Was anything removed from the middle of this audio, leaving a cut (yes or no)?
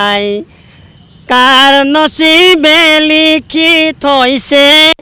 no